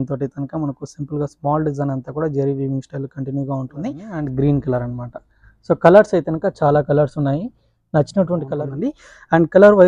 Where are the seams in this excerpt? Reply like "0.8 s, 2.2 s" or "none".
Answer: 4.1 s, 8.5 s